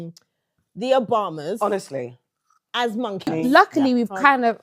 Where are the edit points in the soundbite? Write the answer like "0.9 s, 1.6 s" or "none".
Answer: 3.3 s

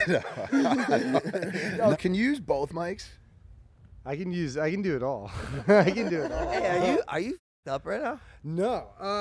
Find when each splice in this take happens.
1.8 s

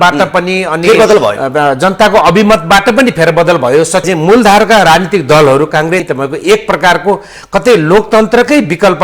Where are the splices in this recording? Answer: 4.0 s, 6.0 s

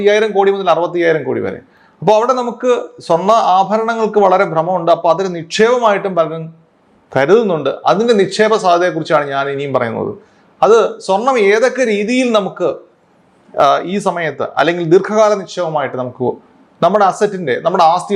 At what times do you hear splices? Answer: none

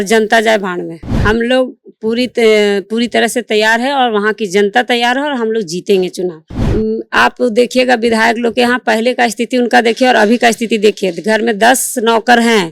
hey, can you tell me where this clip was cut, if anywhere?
1.0 s, 6.5 s

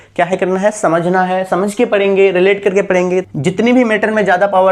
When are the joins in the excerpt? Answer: 3.3 s

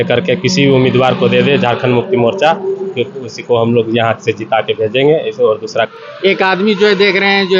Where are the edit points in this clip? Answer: 5.9 s

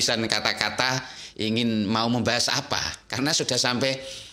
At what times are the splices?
none

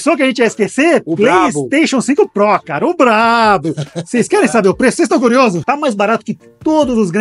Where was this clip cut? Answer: 5.6 s

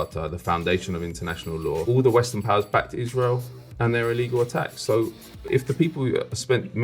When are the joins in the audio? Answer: 1.8 s, 5.5 s

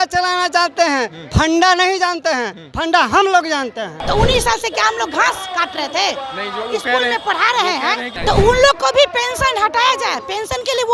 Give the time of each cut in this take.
4.0 s, 8.1 s

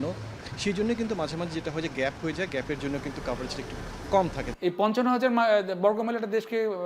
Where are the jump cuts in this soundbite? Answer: 4.5 s

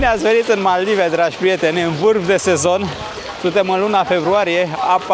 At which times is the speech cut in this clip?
none

